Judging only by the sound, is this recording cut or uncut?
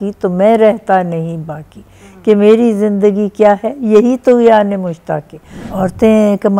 cut